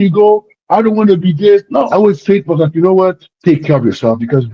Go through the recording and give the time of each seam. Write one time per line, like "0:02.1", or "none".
0:01.9
0:03.3